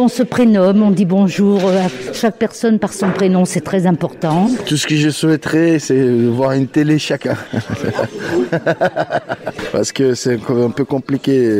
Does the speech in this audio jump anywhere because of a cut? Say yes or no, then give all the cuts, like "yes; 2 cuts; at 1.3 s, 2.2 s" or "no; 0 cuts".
yes; 3 cuts; at 2.1 s, 4.6 s, 9.6 s